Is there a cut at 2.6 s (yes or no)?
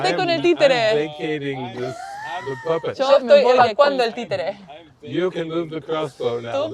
no